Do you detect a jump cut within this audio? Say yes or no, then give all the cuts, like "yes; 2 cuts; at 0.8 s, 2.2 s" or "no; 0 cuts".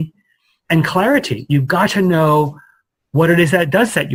no; 0 cuts